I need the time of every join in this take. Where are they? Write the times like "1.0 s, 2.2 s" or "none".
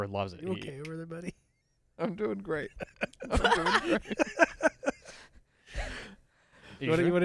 none